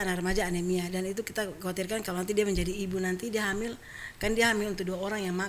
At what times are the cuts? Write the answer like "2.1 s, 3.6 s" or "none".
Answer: none